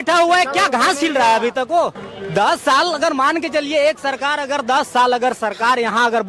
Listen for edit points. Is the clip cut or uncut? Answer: uncut